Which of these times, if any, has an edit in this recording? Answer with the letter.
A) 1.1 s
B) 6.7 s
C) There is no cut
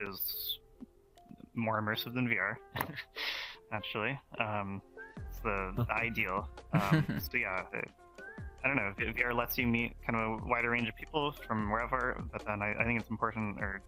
C